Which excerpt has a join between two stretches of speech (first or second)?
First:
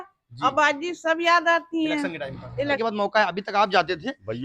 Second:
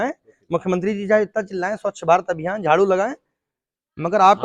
first